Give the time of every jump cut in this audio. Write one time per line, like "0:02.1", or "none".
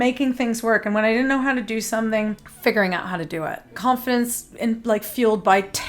0:02.5
0:03.7